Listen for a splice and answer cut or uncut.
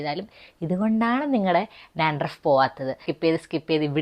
cut